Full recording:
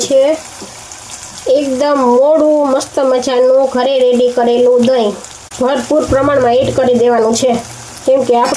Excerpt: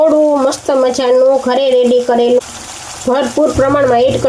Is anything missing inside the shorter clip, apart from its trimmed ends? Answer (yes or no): yes